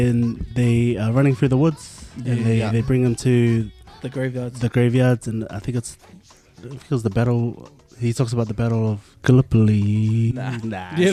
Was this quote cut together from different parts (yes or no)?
no